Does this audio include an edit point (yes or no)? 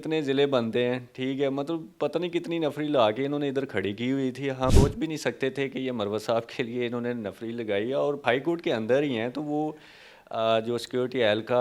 yes